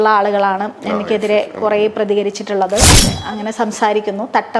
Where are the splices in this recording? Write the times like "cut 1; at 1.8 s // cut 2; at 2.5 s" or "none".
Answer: cut 1; at 3.1 s